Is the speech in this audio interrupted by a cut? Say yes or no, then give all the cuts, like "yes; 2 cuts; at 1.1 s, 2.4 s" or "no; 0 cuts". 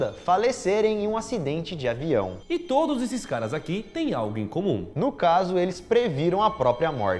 yes; 1 cut; at 2.5 s